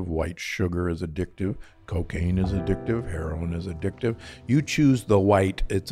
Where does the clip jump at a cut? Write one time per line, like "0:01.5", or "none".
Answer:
none